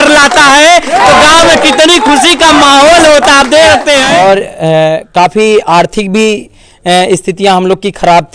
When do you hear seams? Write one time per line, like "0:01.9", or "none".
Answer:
0:04.1